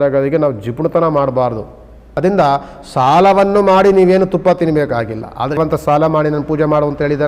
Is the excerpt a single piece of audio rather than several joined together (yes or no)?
no